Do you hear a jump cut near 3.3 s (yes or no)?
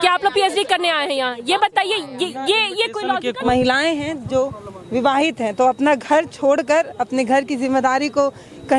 yes